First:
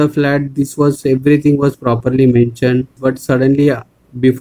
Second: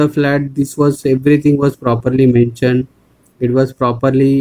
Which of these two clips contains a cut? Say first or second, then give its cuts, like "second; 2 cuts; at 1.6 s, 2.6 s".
first; 1 cut; at 3.0 s